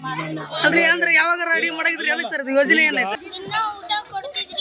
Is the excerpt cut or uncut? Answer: cut